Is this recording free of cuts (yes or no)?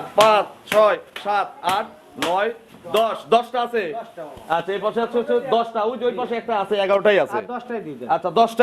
yes